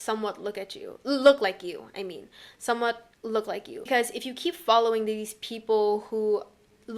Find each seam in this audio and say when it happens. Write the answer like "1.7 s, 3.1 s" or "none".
3.9 s